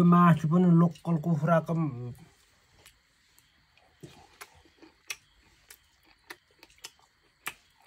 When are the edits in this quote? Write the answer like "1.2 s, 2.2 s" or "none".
none